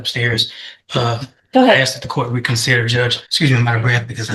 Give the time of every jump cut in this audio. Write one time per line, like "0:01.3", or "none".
0:03.2